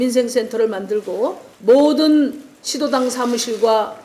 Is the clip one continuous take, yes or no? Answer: no